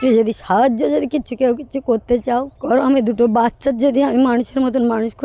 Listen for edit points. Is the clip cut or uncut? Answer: uncut